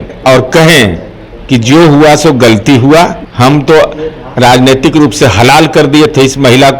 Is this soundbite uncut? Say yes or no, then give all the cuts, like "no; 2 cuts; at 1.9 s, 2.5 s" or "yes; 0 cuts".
yes; 0 cuts